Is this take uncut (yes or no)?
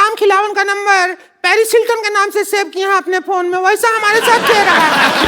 yes